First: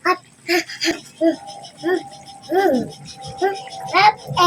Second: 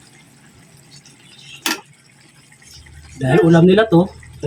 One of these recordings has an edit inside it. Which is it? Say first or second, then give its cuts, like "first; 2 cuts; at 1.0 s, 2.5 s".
first; 1 cut; at 1.1 s